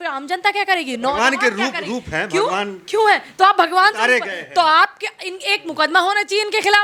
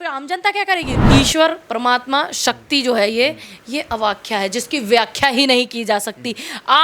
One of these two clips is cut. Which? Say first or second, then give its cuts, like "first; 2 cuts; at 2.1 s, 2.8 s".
second; 1 cut; at 0.9 s